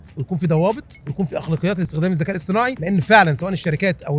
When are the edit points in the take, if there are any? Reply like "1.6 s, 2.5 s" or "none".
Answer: 1.0 s, 1.9 s, 2.8 s